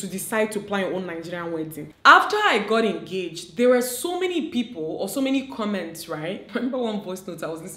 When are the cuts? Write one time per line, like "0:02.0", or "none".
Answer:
0:01.8
0:06.5